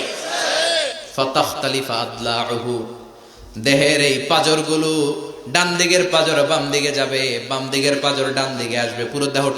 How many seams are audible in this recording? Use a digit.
1